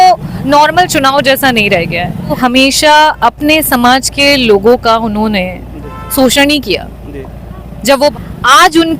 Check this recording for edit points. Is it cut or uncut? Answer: cut